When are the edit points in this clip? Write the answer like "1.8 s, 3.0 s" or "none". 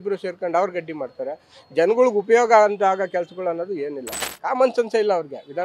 4.1 s